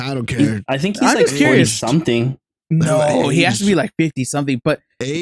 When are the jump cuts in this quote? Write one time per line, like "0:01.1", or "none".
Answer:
none